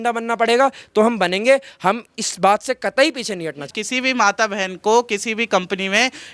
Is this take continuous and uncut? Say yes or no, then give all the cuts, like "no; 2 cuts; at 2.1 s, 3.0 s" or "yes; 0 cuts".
no; 1 cut; at 3.8 s